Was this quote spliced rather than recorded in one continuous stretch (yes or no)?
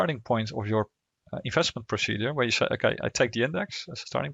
no